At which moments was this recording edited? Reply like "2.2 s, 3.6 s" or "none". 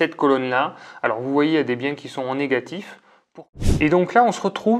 3.3 s